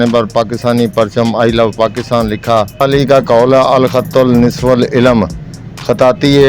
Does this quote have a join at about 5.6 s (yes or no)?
no